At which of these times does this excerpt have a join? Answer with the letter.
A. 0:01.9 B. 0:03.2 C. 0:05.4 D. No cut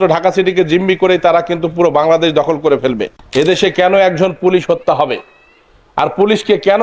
B